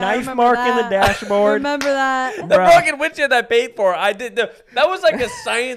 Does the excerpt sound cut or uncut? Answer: uncut